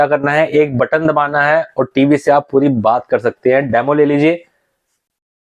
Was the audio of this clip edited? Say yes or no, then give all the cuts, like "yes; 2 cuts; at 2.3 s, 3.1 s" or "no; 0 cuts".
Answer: no; 0 cuts